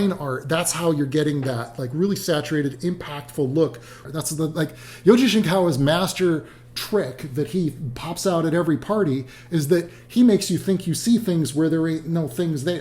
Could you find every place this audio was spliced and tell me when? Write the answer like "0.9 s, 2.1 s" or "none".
4.0 s